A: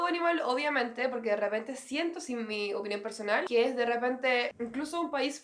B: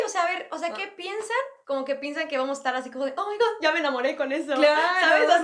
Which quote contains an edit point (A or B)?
A